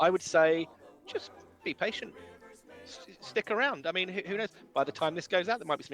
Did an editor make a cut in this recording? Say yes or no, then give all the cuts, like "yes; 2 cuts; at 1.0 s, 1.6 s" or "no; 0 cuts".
no; 0 cuts